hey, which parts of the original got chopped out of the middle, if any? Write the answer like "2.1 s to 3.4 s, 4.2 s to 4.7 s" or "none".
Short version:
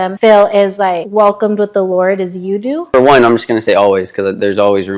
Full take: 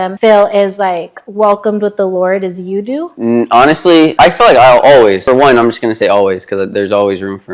1.0 s to 1.3 s, 3.1 s to 5.2 s